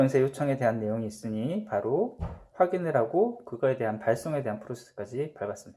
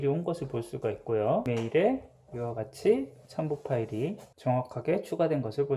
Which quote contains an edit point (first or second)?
second